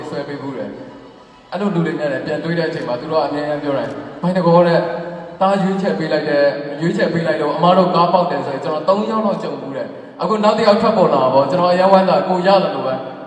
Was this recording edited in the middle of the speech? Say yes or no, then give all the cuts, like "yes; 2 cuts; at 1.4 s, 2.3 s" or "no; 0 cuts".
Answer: no; 0 cuts